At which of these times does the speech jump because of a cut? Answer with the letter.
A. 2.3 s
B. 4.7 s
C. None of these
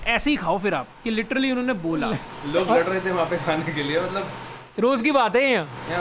A